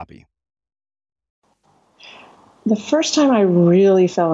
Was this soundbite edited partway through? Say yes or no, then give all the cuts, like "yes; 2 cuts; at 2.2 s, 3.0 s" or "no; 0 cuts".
yes; 1 cut; at 1.4 s